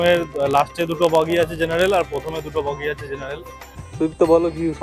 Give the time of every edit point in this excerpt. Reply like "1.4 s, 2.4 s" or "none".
3.9 s